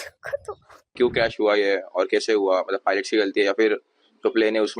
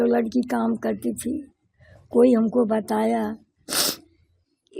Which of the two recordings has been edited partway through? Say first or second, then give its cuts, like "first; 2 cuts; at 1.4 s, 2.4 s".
first; 1 cut; at 0.9 s